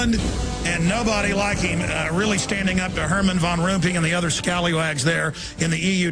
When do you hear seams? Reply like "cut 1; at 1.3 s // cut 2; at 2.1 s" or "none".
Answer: cut 1; at 4.5 s